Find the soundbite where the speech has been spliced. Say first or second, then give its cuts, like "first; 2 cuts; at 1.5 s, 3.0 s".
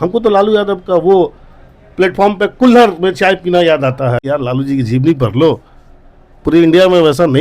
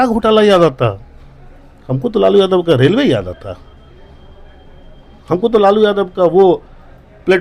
first; 1 cut; at 4.2 s